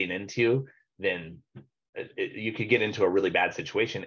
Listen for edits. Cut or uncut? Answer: uncut